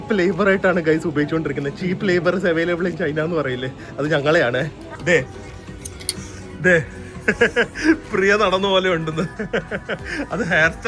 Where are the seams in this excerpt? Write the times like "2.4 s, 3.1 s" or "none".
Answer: 4.9 s